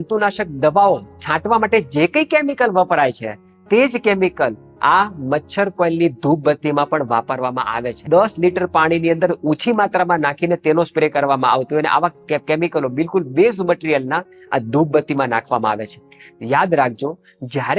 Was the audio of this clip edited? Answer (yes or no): no